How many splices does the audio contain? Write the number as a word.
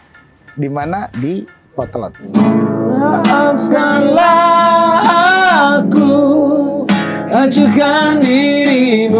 one